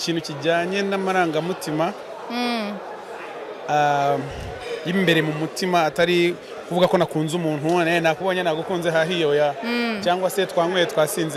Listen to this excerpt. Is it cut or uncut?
uncut